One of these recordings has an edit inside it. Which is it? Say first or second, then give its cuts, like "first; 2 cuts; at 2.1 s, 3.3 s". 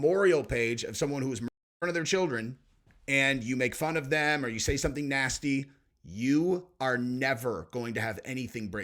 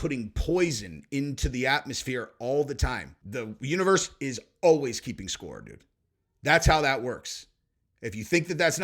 second; 1 cut; at 3.2 s